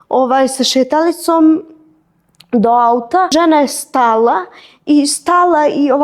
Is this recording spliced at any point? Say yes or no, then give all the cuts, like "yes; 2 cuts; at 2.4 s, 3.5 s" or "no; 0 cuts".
yes; 1 cut; at 3.3 s